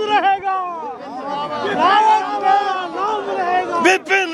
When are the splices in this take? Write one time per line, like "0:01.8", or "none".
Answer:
none

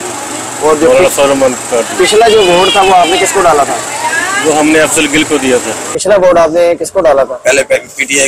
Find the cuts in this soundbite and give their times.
0:05.8

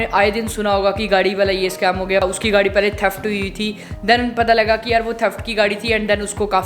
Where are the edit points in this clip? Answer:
0:02.2
0:04.0

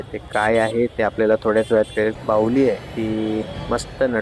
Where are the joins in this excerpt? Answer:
0:02.2

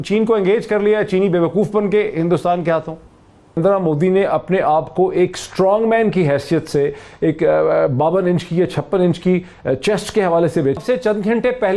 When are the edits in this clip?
0:03.6
0:10.8

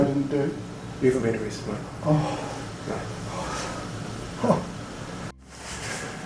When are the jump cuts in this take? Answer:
0:05.3

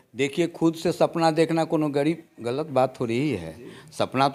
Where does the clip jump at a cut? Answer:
none

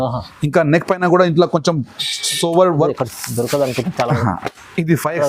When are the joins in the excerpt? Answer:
0:02.9

